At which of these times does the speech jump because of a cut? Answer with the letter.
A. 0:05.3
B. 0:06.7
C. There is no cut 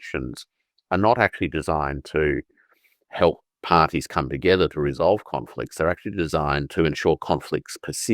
B